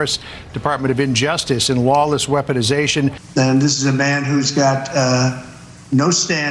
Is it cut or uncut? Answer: cut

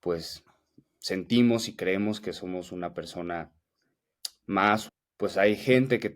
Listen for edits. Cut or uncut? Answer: cut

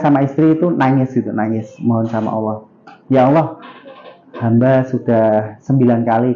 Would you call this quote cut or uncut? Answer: uncut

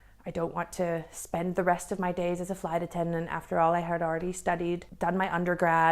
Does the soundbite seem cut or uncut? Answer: cut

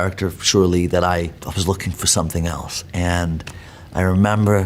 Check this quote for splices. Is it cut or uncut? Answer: uncut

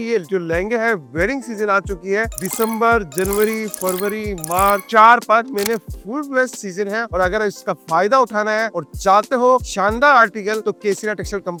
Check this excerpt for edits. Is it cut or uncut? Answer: uncut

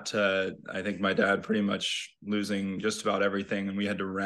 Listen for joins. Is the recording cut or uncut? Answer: uncut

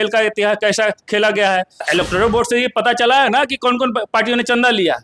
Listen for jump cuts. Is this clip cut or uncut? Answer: cut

